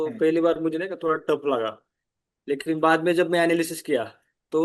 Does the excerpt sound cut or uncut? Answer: uncut